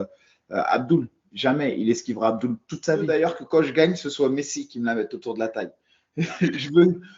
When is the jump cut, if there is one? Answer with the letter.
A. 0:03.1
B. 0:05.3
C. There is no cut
A